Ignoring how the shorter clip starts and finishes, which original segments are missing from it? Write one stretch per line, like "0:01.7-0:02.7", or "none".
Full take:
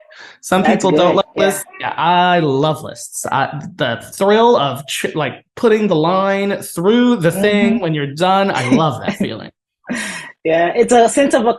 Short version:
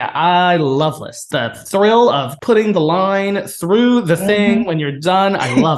0:03.0-0:03.7
0:04.8-0:05.5